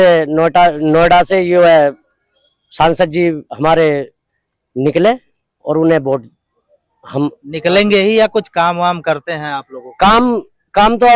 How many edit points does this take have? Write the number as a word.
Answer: zero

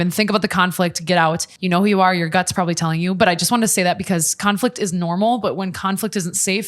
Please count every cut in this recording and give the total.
one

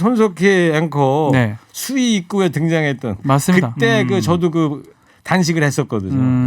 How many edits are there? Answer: zero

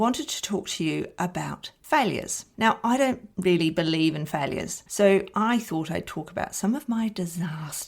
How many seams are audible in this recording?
two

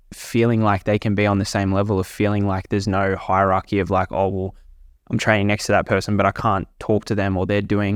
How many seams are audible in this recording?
zero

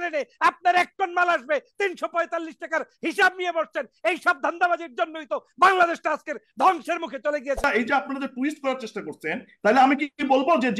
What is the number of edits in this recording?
one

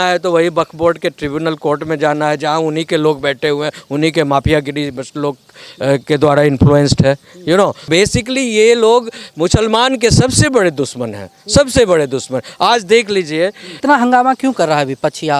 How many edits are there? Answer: two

